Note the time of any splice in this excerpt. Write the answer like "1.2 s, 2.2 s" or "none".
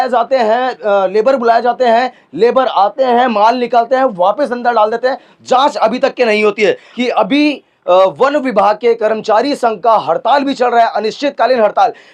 6.9 s